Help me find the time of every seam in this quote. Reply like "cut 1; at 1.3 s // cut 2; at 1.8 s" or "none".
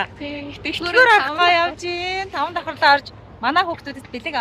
none